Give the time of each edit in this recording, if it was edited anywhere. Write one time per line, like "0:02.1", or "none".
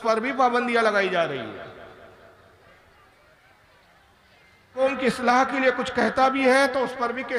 0:04.8

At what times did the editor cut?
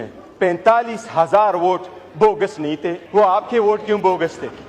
0:03.0

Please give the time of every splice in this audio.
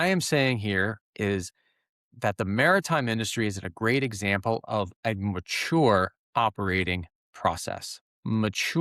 none

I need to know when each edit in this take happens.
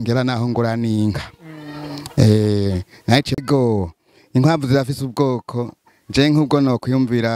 0:03.4

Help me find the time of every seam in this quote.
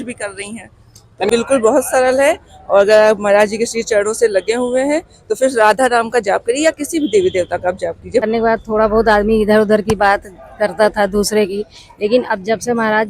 0:01.3
0:08.2

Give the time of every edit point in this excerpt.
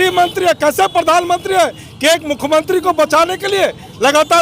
none

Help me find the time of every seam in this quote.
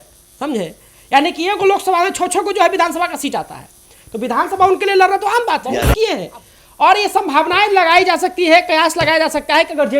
0:05.9

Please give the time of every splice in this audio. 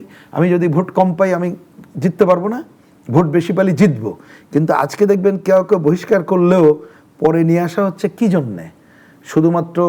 none

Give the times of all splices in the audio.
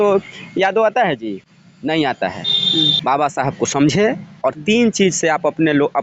0:02.9

